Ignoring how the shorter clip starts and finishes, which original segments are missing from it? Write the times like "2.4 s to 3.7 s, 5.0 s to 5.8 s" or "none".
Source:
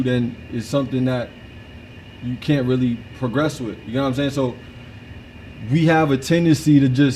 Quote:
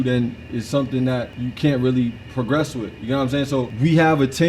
1.3 s to 2.2 s, 4.6 s to 5.6 s